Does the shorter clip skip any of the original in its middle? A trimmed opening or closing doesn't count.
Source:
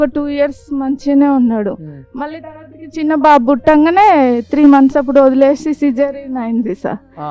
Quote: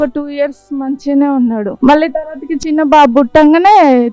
yes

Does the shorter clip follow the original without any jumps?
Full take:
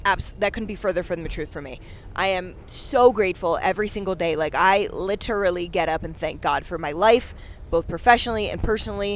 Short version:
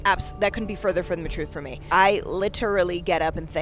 no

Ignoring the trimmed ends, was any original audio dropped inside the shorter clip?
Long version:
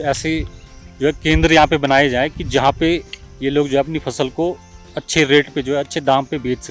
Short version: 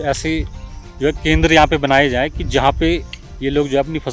no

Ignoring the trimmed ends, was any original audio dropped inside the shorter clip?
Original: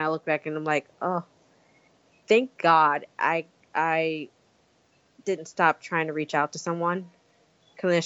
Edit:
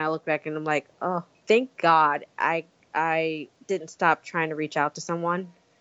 yes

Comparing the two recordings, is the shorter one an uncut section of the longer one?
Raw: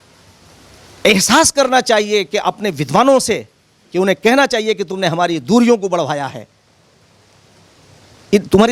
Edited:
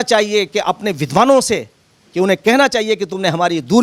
yes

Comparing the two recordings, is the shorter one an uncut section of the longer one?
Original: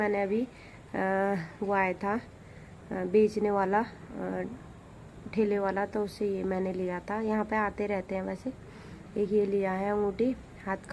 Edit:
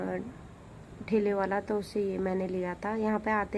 yes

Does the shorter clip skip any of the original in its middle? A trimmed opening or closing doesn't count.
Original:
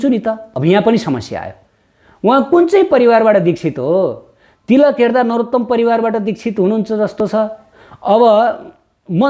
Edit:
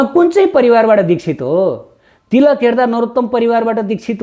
no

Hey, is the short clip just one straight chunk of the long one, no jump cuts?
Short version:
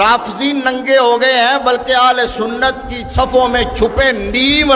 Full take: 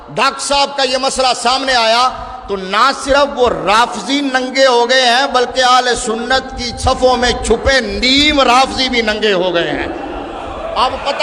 yes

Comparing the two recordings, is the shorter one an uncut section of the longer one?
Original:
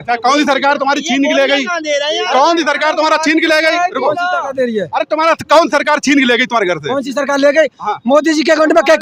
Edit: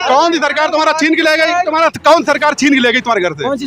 no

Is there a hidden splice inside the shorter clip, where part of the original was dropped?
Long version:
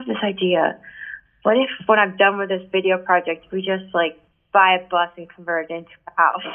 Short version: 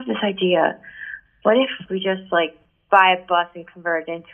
yes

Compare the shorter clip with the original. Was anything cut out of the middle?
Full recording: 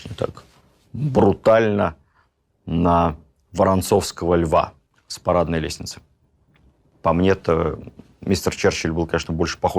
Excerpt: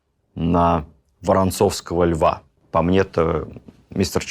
yes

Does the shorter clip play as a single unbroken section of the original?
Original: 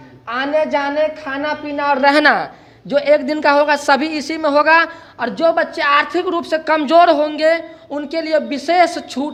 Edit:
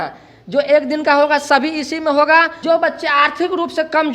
no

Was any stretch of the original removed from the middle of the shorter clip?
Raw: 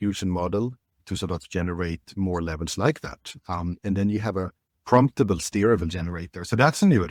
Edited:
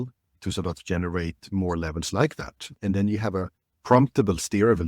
yes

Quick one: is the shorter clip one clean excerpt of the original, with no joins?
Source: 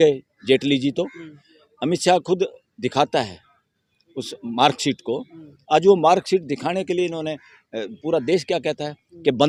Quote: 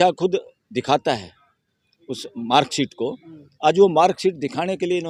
yes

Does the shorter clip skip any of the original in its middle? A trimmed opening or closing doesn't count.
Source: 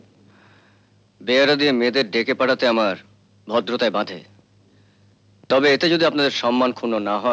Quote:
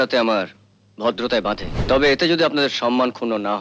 yes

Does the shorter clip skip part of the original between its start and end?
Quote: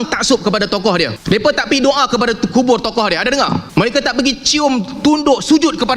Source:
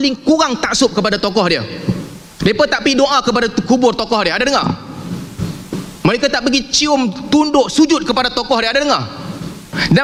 yes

